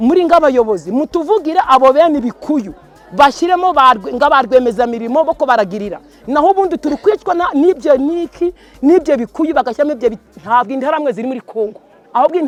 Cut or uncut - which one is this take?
uncut